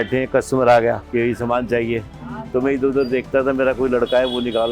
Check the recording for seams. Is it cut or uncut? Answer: cut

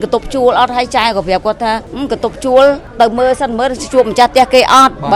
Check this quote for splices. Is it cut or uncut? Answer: cut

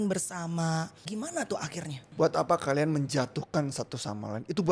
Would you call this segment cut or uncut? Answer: cut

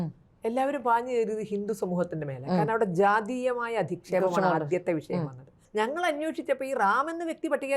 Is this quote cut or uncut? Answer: cut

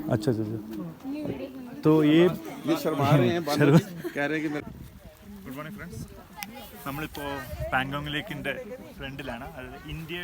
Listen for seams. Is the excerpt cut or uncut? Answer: cut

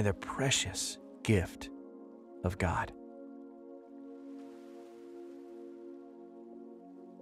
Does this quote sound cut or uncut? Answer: cut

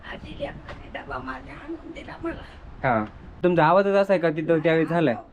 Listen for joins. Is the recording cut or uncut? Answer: cut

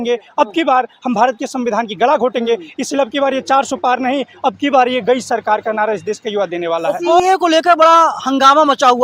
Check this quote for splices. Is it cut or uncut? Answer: cut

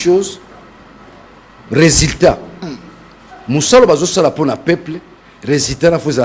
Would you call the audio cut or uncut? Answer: uncut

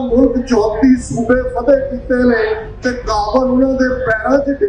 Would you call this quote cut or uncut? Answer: uncut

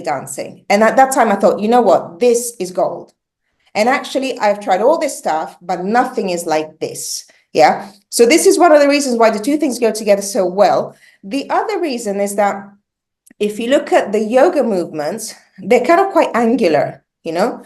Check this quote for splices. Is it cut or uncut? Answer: uncut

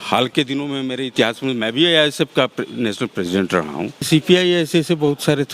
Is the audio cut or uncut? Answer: cut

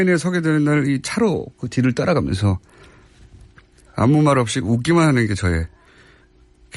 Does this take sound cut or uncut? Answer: cut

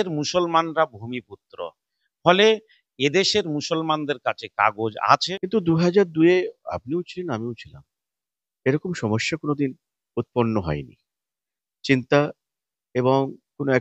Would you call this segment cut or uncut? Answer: cut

